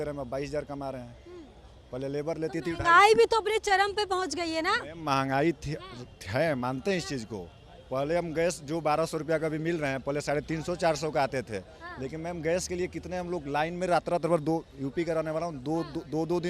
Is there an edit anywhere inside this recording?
no; 0 cuts

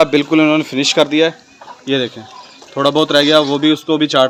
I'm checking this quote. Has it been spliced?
no; 0 cuts

